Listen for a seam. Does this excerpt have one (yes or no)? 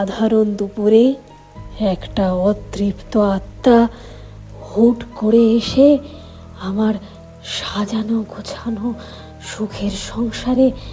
no